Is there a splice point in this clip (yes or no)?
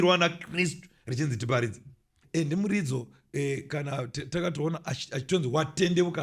yes